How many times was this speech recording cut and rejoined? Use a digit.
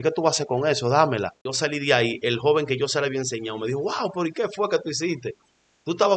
1